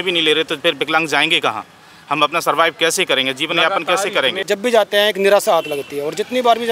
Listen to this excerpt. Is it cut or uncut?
cut